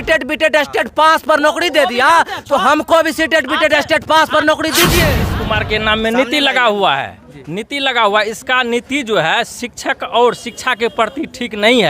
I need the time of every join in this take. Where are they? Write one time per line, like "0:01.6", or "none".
0:05.3